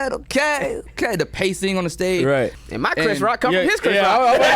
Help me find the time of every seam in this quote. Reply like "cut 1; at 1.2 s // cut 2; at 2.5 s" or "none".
cut 1; at 2.5 s